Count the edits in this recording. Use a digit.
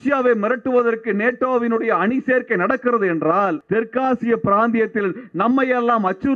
1